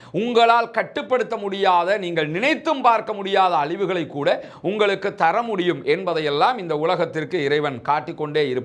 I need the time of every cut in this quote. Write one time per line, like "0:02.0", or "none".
none